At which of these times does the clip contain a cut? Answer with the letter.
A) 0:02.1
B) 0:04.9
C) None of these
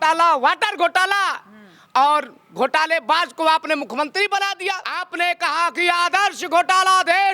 B